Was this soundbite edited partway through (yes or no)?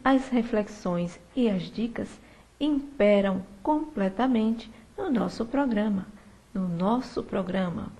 yes